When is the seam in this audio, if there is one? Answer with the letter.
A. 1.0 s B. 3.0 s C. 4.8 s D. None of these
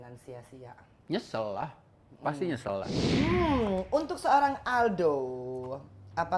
B